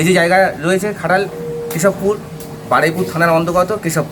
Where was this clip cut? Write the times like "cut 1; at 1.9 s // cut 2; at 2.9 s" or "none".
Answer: none